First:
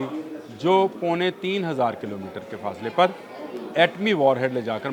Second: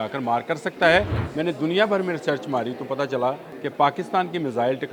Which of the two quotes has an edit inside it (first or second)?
second